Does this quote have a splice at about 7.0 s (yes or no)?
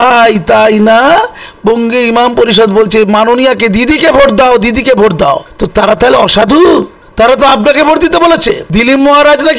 yes